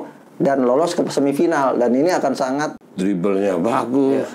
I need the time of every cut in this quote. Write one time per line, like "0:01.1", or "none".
0:02.7